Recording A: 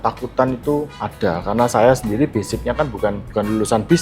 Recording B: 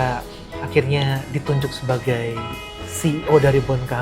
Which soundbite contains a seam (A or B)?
A